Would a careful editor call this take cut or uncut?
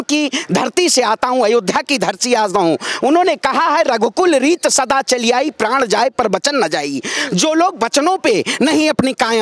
uncut